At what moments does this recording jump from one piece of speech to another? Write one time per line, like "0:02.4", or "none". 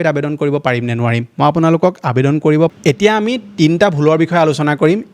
0:02.8